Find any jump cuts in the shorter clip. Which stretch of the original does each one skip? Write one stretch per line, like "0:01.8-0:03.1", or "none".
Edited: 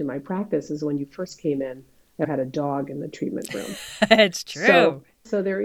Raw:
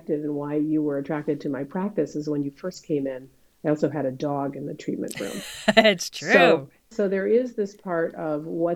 0:03.7-0:03.9